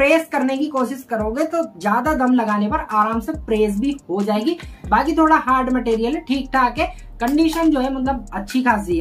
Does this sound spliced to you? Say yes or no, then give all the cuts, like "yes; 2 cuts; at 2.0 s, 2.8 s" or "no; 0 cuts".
no; 0 cuts